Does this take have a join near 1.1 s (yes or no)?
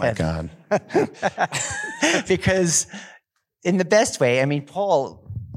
yes